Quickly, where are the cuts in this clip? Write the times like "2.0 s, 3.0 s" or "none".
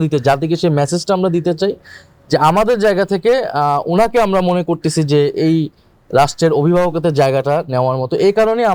none